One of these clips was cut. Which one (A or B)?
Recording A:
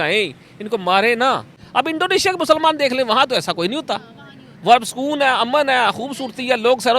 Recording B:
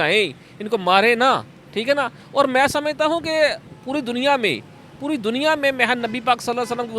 A